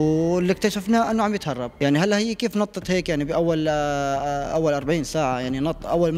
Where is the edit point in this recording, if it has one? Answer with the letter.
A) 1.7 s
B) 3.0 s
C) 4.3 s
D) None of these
A